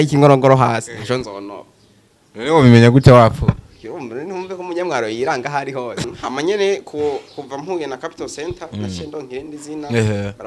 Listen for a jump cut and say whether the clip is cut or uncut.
cut